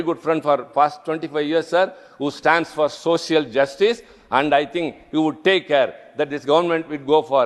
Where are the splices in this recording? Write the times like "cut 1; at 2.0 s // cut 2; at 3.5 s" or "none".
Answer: none